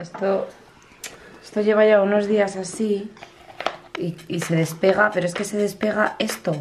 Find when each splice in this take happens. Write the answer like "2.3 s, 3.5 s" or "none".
none